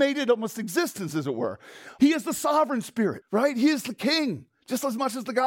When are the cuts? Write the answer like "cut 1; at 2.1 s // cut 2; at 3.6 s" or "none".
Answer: cut 1; at 1.8 s // cut 2; at 3.2 s

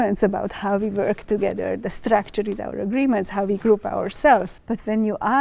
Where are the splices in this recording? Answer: cut 1; at 4.5 s

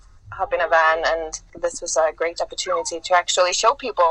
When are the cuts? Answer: cut 1; at 1.4 s

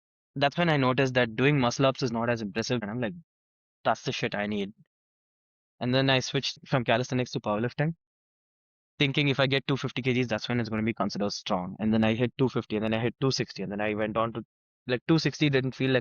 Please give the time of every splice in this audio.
cut 1; at 2.8 s // cut 2; at 6.6 s

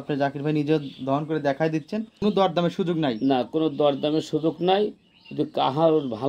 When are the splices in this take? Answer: cut 1; at 2.2 s

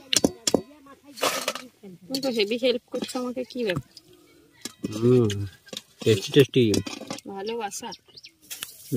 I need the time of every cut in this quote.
none

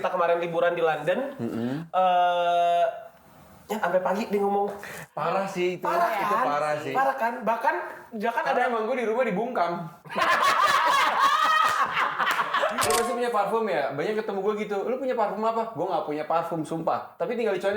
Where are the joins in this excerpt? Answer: cut 1; at 12.9 s

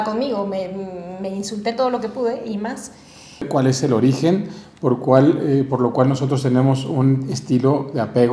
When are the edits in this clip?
cut 1; at 3.5 s

